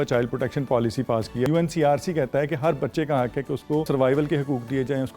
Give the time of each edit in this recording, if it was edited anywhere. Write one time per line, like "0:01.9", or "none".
0:01.5
0:03.9